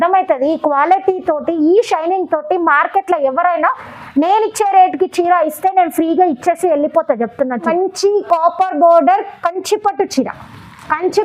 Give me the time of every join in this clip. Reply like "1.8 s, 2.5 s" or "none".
8.2 s